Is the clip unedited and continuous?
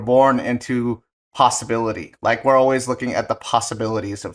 yes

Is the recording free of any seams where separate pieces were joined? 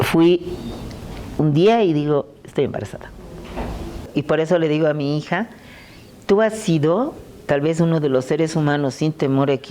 no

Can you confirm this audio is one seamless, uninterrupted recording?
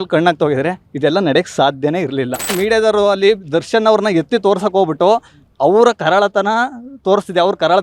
no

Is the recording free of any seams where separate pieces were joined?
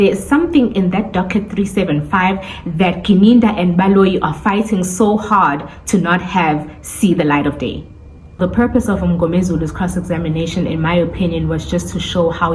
no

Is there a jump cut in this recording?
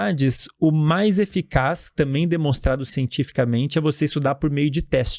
no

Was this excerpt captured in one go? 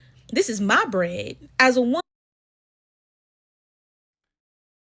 yes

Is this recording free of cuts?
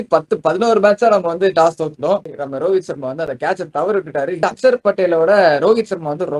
no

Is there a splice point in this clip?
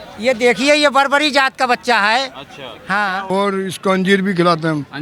yes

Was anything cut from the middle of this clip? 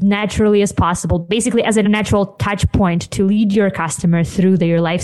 yes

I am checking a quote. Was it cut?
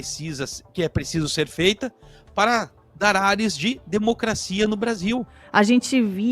yes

